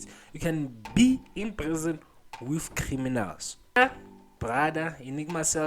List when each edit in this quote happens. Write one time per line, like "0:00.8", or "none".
0:03.8